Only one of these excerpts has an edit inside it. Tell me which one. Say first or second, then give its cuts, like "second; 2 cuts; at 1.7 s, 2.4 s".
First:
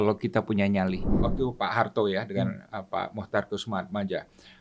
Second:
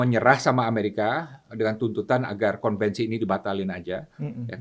first; 1 cut; at 1.2 s